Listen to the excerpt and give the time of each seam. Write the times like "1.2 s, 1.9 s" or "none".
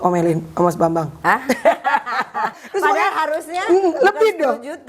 2.6 s